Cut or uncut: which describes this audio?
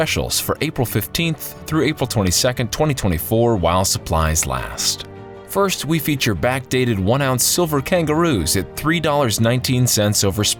uncut